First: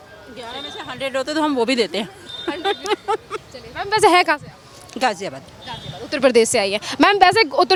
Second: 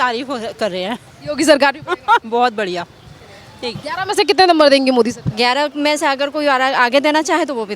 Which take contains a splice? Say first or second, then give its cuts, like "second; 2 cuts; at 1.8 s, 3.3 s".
second; 1 cut; at 3.8 s